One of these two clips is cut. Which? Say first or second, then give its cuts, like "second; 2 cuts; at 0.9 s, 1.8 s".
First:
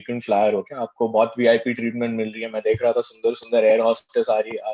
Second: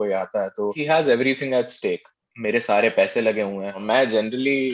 second; 3 cuts; at 0.8 s, 2.3 s, 3.8 s